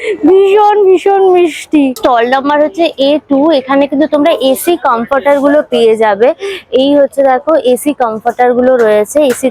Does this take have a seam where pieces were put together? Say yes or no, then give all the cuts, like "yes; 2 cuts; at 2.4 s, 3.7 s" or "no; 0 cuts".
no; 0 cuts